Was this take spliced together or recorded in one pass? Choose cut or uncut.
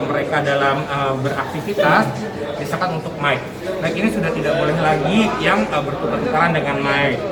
uncut